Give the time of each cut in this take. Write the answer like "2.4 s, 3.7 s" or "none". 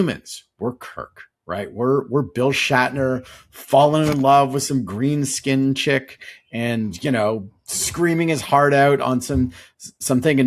none